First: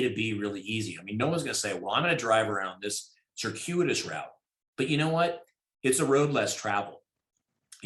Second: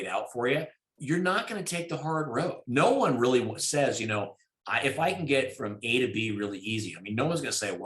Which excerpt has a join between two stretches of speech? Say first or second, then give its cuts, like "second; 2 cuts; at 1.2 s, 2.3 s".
second; 2 cuts; at 0.9 s, 2.6 s